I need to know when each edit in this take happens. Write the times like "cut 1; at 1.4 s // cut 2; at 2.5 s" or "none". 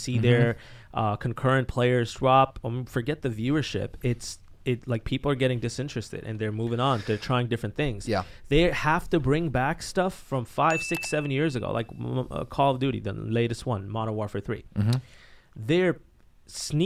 none